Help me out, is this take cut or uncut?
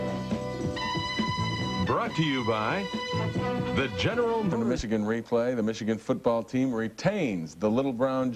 uncut